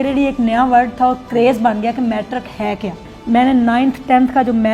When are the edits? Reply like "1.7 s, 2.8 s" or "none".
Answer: 3.1 s